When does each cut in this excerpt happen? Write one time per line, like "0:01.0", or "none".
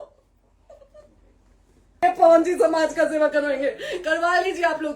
0:02.0

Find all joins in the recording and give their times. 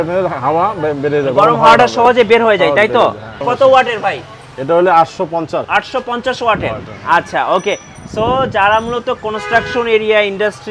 0:03.4
0:05.7

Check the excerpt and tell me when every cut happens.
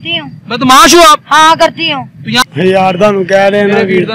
0:02.4

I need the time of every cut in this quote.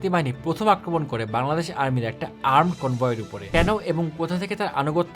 0:03.3

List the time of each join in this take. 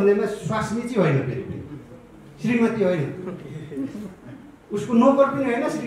none

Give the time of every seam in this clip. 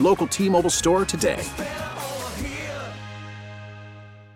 none

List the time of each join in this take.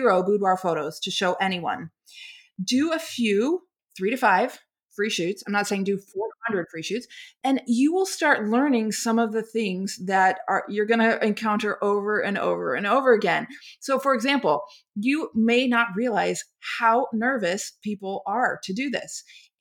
0:03.8

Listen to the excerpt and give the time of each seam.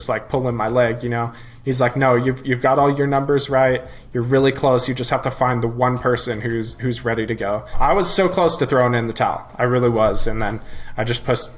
0:07.7

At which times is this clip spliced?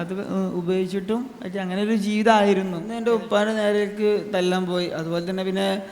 0:03.0

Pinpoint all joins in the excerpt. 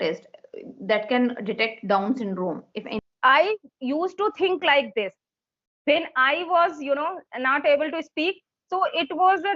0:02.9

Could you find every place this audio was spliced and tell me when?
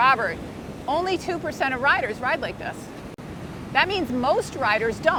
none

